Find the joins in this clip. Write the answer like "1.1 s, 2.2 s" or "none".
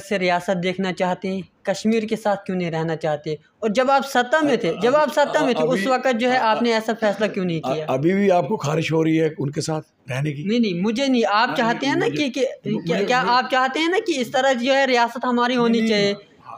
none